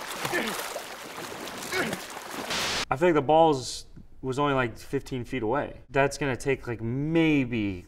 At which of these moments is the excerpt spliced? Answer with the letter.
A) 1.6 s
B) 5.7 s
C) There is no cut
C